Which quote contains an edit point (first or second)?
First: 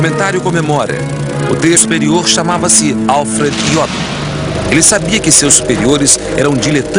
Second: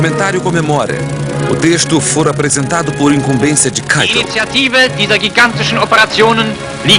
second